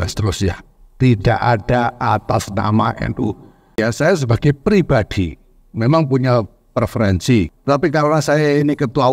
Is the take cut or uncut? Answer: cut